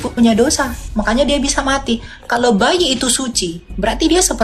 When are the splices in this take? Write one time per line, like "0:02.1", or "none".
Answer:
none